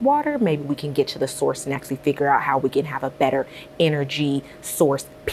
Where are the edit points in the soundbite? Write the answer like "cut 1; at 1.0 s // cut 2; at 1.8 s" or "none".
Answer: none